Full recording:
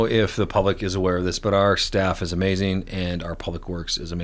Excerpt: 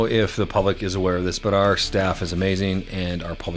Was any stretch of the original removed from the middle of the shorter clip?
no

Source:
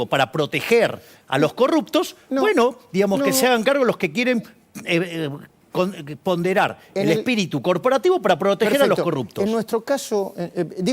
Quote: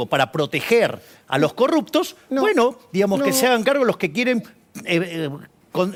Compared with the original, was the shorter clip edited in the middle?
no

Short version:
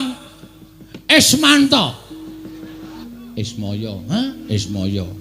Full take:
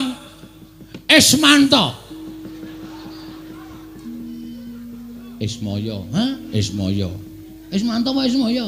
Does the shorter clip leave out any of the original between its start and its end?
yes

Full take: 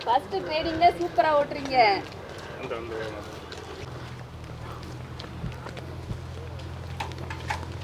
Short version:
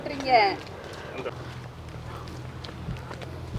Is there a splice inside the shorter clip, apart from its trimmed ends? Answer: yes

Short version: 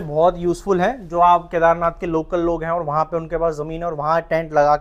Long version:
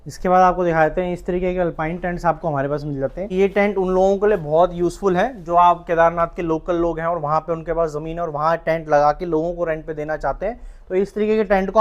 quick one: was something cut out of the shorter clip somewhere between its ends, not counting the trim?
no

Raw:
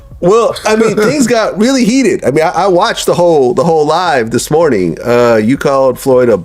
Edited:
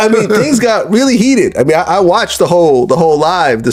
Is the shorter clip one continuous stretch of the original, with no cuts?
yes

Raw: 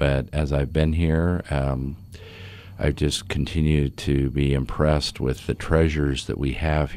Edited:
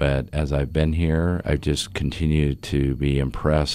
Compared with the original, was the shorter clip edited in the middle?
yes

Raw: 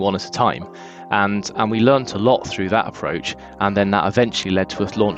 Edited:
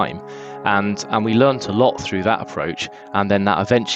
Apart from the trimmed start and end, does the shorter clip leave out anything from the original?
no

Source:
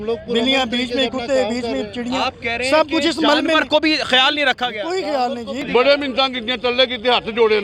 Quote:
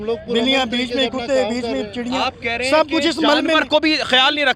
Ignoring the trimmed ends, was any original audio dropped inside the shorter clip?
no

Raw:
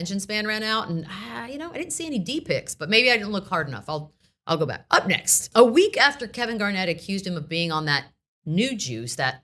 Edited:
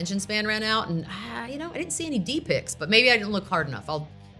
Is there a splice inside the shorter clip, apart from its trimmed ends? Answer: no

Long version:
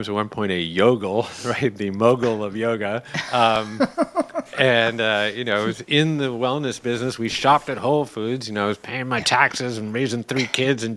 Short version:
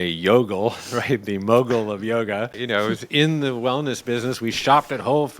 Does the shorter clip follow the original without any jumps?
no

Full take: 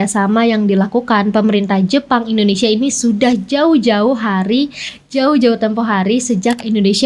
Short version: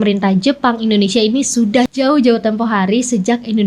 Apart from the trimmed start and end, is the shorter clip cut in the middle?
yes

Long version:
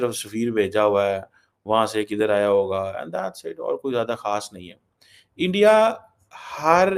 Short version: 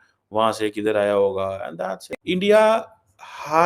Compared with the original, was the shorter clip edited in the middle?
yes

